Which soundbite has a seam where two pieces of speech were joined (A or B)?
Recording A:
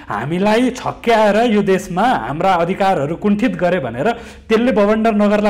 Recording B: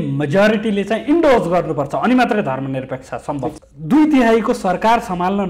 B